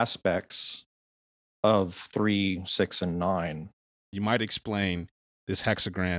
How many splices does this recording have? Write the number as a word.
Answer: one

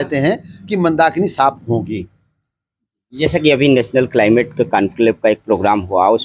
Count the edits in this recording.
zero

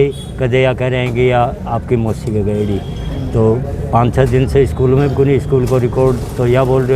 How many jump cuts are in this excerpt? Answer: zero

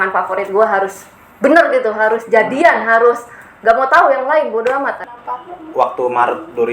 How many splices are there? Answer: one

